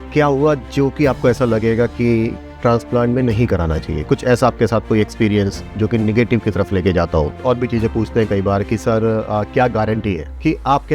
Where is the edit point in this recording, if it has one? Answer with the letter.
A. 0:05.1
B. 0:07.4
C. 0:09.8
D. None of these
B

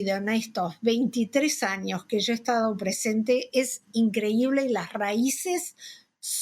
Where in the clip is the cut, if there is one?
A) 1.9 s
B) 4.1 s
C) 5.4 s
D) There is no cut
D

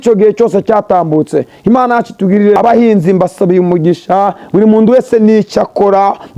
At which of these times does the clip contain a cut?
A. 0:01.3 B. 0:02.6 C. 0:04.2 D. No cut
B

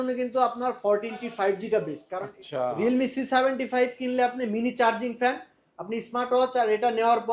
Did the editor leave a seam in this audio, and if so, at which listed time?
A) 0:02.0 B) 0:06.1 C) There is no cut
A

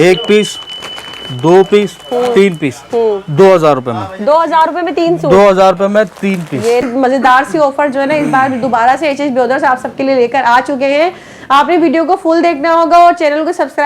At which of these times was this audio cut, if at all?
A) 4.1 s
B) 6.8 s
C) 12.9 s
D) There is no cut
B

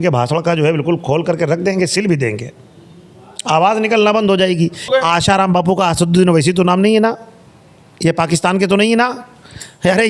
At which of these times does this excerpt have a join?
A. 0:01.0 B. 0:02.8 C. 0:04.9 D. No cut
C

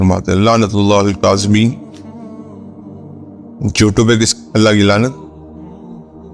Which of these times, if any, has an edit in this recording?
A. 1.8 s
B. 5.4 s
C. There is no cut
B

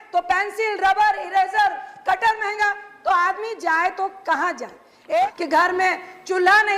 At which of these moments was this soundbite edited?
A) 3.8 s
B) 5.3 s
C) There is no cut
B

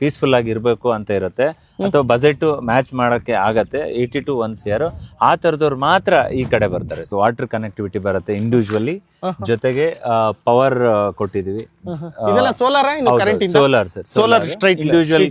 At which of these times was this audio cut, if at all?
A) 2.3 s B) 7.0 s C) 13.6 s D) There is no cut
B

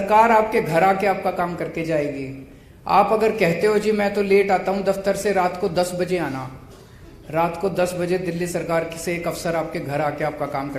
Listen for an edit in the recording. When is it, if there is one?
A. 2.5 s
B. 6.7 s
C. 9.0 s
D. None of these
D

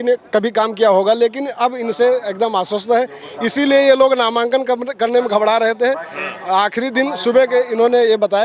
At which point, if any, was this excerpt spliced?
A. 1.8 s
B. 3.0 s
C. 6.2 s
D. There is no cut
D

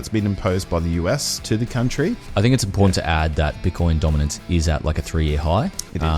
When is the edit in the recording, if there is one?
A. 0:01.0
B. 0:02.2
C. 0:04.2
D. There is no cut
B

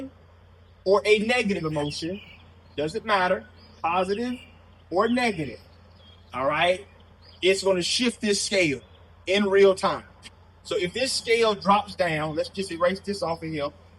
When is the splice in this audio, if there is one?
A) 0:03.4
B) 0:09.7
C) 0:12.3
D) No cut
D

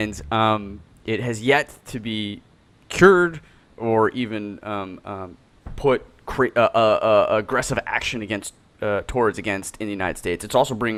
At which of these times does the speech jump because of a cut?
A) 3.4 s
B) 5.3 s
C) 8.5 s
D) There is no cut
D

